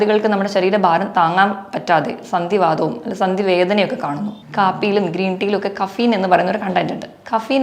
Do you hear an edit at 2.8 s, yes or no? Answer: no